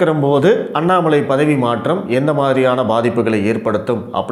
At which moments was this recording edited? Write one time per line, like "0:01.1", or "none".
none